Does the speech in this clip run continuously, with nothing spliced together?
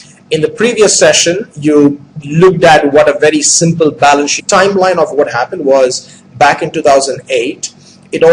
yes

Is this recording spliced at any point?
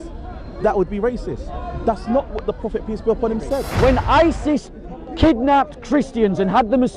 yes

